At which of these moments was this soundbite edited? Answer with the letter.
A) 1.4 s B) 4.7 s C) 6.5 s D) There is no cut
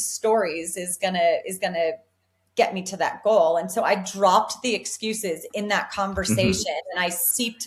D